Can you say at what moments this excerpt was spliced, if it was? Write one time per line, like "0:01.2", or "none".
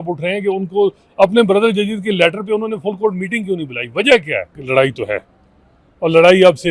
0:04.6